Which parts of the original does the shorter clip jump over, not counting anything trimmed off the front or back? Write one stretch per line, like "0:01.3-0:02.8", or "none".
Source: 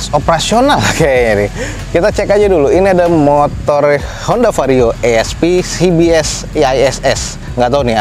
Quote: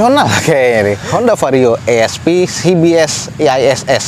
0:01.6-0:04.2